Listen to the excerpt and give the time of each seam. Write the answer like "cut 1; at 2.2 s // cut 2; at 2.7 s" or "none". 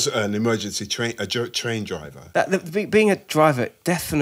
cut 1; at 2.2 s